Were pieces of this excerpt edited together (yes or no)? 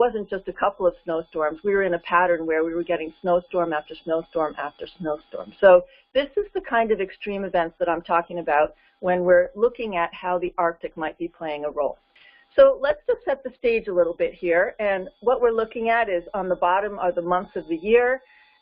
yes